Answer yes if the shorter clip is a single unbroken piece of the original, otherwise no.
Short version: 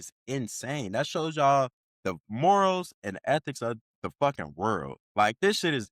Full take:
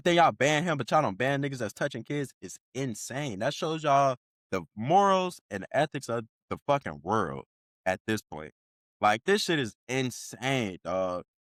no